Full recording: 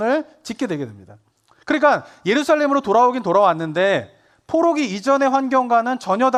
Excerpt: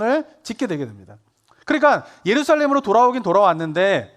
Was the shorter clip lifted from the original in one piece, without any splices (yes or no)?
yes